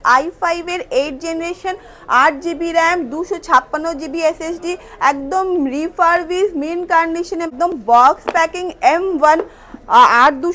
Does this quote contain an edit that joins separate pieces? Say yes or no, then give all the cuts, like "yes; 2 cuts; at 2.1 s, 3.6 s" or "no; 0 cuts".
yes; 1 cut; at 7.5 s